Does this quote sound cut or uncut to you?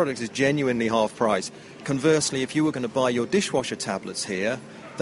uncut